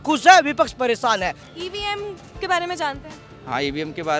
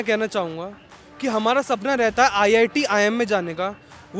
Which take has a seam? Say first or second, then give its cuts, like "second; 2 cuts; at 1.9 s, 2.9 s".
first; 1 cut; at 1.4 s